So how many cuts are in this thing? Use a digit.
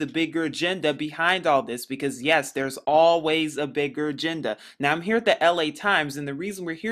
0